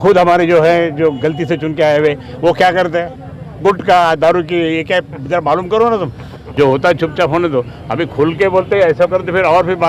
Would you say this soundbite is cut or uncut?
cut